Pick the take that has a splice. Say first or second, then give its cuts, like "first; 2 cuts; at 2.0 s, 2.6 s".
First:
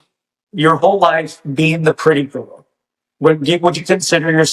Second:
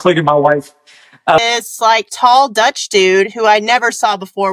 second; 1 cut; at 1.4 s